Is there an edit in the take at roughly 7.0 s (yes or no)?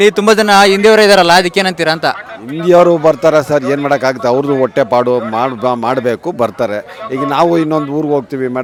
no